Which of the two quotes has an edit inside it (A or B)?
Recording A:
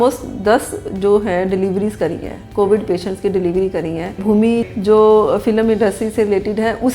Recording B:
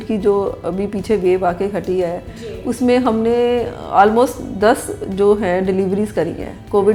A